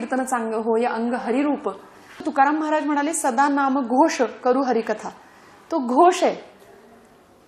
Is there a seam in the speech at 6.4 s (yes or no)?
no